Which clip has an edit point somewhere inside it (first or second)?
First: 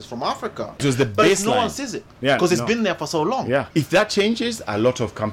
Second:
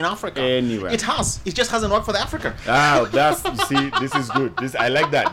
first